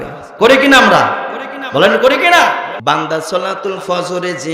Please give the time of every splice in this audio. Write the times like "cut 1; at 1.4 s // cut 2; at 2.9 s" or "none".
cut 1; at 2.7 s